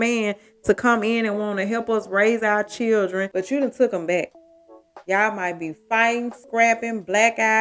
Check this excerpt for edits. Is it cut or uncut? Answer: cut